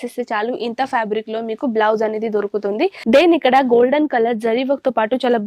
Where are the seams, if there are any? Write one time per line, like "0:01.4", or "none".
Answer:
0:03.0